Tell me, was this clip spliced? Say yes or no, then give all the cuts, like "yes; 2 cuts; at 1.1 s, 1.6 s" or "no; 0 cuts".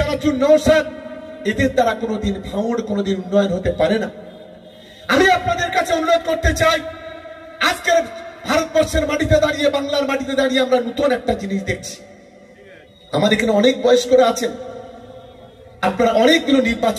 no; 0 cuts